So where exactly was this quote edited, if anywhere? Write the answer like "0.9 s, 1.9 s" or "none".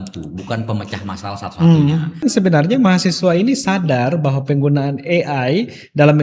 2.2 s